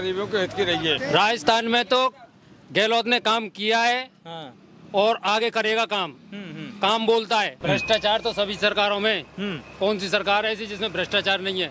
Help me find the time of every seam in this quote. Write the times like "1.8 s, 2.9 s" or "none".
1.0 s, 7.5 s